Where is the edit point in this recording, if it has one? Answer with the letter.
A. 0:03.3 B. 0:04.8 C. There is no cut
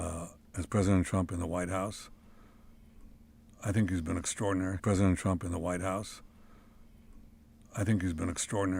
B